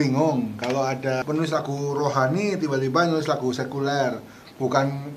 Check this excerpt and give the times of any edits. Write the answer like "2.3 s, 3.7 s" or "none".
1.2 s